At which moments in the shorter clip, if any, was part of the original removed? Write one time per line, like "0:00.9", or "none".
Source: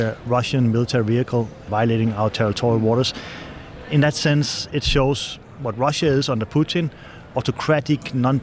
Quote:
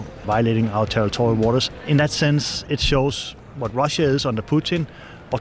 0:01.8